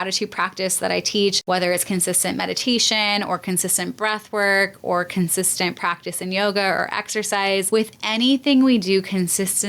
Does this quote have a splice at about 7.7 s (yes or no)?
yes